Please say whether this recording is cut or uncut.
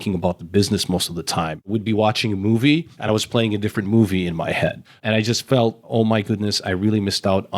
cut